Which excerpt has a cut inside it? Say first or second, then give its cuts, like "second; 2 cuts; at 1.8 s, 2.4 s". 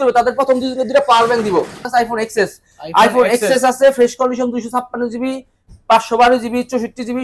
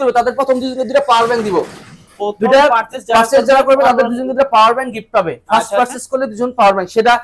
first; 1 cut; at 1.8 s